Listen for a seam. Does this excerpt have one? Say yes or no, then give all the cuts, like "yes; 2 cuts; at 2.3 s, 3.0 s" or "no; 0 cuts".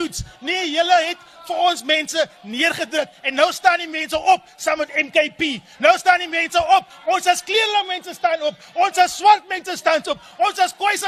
no; 0 cuts